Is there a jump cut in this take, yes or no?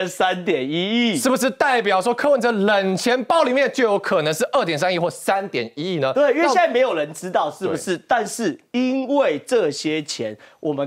no